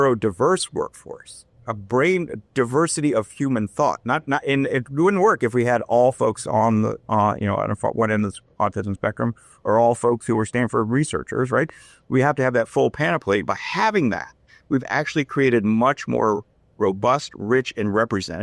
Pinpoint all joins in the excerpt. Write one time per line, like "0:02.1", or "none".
none